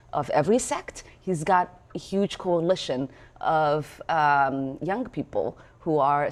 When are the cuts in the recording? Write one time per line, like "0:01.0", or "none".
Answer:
none